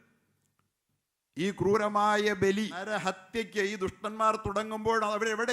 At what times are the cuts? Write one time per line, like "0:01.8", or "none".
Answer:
0:02.9